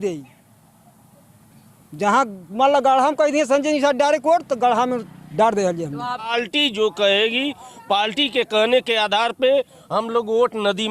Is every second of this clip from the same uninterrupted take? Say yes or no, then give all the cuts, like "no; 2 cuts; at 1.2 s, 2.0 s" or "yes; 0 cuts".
no; 1 cut; at 6.3 s